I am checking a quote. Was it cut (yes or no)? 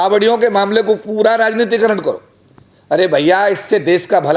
no